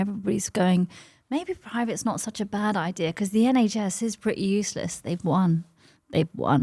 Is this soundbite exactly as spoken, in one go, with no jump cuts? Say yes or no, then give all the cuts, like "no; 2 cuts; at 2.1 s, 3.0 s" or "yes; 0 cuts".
yes; 0 cuts